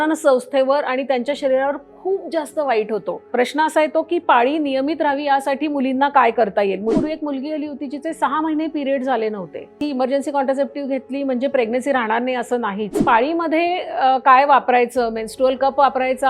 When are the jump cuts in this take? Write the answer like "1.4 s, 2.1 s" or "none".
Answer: 3.3 s, 7.0 s, 9.8 s, 12.9 s